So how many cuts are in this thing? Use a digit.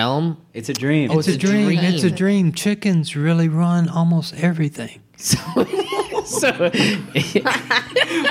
0